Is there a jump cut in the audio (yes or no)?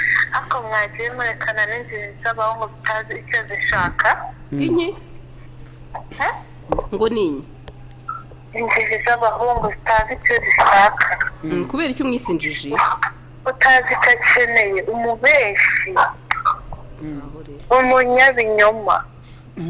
no